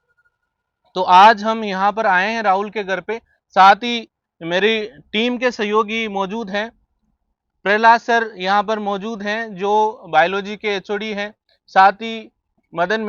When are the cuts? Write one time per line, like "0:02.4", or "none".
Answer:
none